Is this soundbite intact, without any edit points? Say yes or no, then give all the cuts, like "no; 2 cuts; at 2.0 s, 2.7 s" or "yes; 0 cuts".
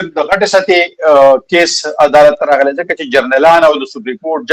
yes; 0 cuts